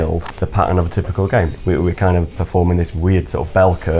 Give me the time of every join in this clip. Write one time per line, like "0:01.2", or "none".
0:01.5